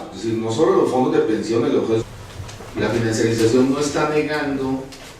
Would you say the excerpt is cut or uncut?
uncut